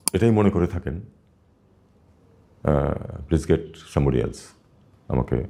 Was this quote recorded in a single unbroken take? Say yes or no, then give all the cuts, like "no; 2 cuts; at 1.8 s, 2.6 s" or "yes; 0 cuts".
yes; 0 cuts